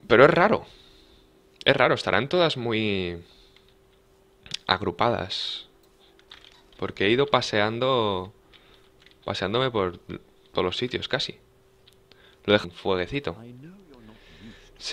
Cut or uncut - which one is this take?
uncut